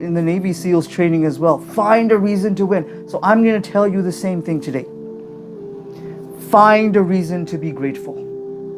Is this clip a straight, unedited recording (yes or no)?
no